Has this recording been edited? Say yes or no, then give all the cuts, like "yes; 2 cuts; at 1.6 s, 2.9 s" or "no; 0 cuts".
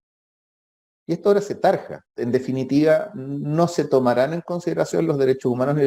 yes; 1 cut; at 2.0 s